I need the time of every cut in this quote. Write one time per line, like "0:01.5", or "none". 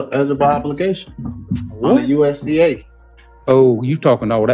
none